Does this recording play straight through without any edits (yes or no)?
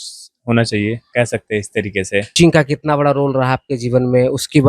no